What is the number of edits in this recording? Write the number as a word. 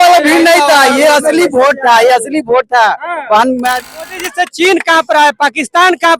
one